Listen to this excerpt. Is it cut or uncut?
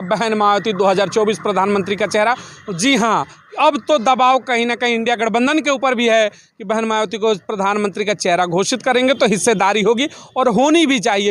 uncut